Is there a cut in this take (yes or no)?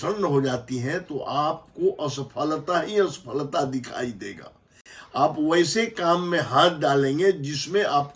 no